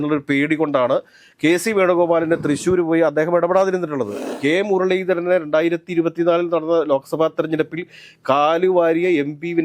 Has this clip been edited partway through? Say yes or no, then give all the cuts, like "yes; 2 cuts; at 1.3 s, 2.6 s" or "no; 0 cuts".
yes; 1 cut; at 4.2 s